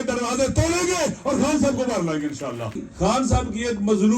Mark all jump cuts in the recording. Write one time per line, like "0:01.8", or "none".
0:02.9